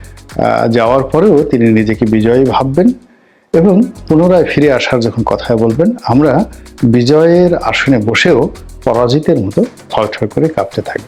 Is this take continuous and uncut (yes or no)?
yes